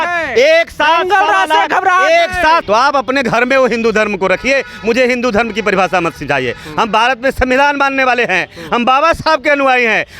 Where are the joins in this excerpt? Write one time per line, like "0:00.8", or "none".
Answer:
0:02.6